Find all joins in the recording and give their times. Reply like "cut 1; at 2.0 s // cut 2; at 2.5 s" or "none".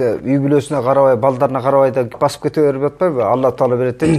none